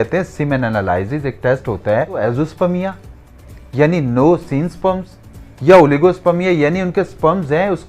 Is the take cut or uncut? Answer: cut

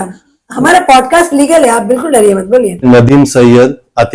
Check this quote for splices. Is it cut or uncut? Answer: cut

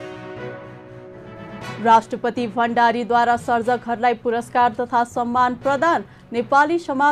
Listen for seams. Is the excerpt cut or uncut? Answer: cut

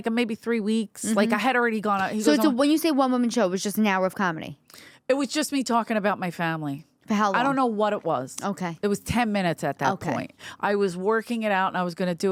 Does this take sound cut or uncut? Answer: uncut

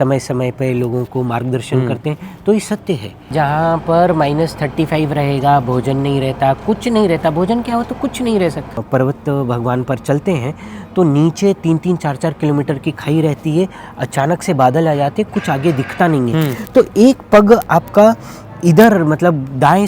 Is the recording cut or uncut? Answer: cut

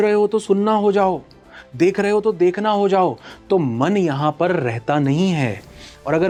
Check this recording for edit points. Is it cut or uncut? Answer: uncut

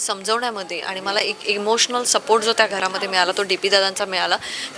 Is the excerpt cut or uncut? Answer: uncut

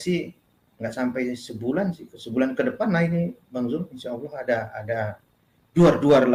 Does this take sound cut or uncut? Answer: uncut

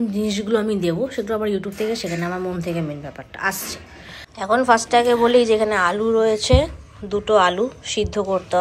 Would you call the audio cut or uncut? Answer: cut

